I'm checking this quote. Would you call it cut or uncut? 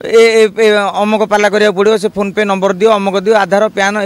uncut